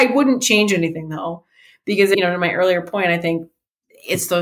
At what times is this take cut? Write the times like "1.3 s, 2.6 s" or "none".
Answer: 2.1 s